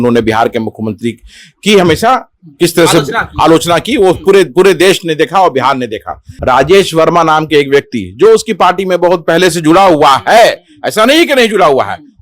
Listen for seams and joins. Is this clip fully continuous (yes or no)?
no